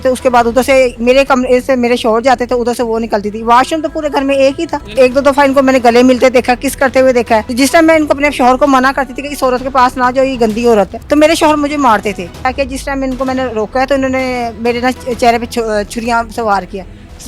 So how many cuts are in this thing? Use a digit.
4